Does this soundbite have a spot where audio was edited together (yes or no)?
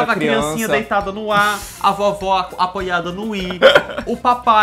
no